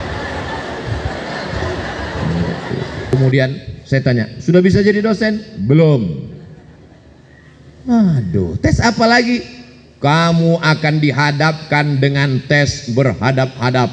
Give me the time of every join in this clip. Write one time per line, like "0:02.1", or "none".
0:03.1